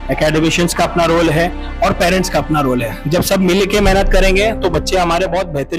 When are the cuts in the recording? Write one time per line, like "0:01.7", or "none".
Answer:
none

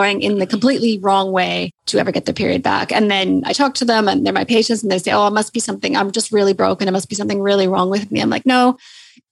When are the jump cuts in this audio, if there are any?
0:01.7

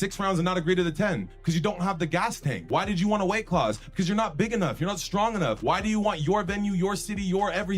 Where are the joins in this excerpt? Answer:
0:02.5
0:05.6

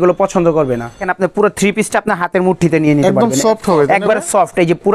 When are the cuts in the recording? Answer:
0:01.1

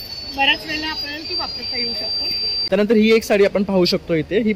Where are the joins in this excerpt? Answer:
0:02.5

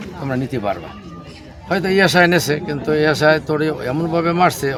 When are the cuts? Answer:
none

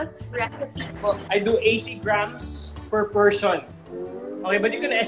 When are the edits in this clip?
0:01.2
0:03.8

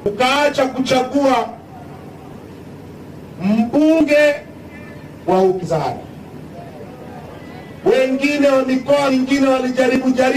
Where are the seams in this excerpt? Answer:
none

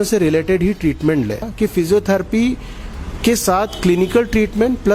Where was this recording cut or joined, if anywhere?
0:01.5

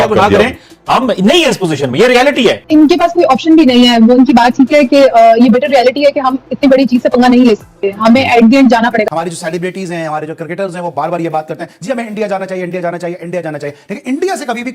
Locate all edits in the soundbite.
0:02.6
0:09.0

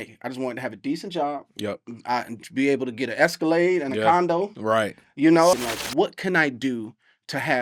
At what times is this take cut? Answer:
0:05.5

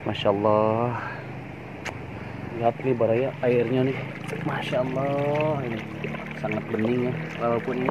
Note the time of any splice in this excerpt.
0:02.6

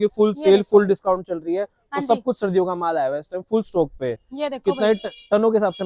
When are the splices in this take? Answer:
none

